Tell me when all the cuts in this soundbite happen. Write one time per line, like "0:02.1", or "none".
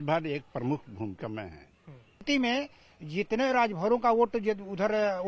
0:02.2